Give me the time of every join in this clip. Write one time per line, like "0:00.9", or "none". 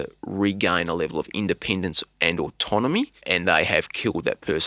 0:03.2